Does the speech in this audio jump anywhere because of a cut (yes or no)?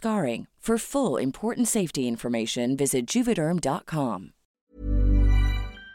yes